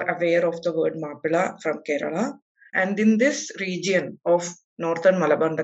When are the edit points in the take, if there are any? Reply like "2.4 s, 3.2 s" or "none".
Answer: 2.7 s